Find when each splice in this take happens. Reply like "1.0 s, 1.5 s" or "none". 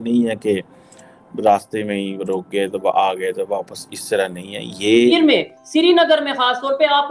5.1 s